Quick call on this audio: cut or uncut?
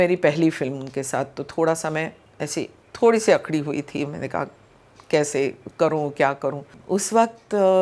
cut